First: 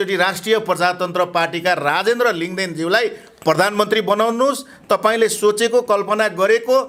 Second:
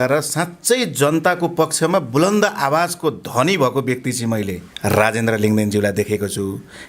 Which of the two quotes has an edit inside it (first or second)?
second